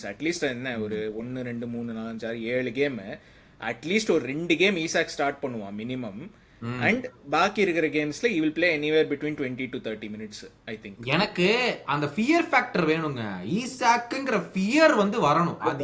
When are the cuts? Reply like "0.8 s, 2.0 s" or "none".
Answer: none

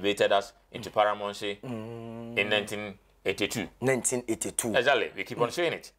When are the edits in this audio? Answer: none

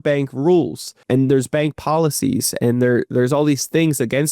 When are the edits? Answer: 0.9 s

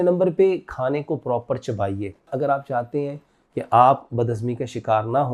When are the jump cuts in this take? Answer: 2.3 s

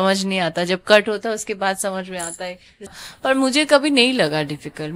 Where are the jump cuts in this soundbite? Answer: 2.9 s

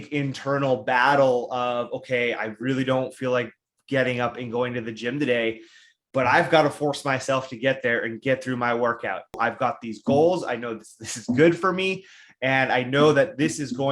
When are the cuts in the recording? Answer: 9.4 s

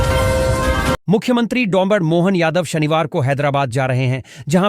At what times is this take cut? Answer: 1.0 s

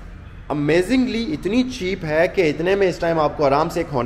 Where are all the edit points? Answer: none

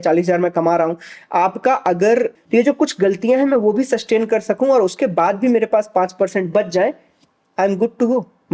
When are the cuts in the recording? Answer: 2.4 s

